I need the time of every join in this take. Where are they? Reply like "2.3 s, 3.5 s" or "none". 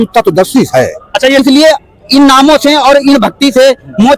0.9 s